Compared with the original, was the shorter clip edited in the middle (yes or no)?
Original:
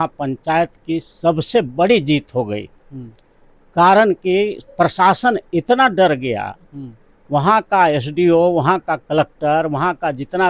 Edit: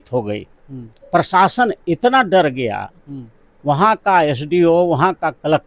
yes